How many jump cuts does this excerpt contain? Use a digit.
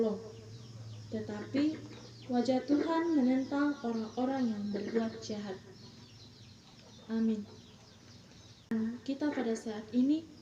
1